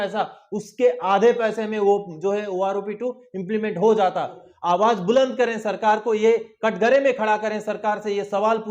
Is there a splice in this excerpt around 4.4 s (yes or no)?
yes